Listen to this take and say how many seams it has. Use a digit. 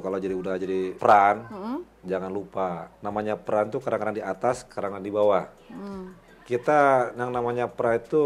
2